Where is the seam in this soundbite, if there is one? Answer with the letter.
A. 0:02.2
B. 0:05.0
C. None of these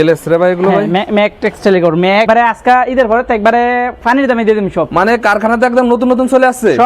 A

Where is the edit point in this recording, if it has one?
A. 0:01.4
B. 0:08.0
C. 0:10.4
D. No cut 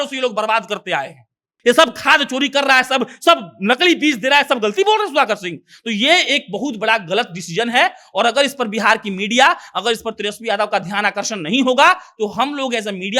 A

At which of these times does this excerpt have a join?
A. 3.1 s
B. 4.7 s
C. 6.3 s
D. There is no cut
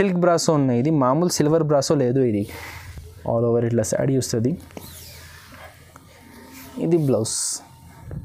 D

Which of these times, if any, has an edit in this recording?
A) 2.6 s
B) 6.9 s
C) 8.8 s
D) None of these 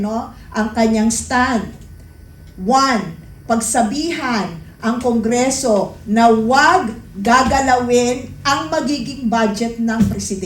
D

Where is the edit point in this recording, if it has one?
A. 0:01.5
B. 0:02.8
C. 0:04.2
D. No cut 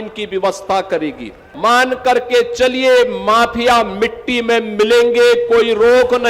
A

